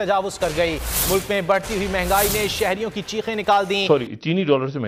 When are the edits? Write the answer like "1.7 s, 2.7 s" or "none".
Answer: 3.8 s